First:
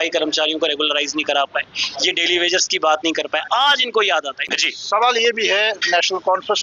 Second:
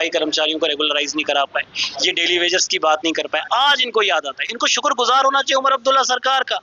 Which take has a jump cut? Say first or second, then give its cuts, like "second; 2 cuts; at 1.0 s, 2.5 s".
first; 1 cut; at 4.5 s